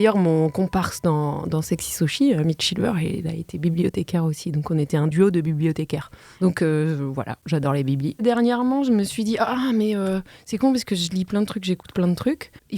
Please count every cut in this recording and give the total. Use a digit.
2